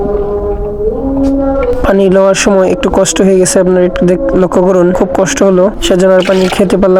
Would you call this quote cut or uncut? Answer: uncut